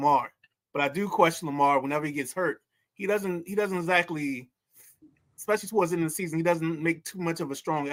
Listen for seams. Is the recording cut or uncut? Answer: uncut